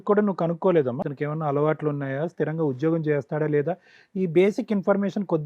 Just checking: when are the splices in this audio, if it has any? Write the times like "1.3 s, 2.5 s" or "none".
1.0 s